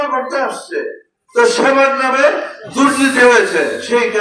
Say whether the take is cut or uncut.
cut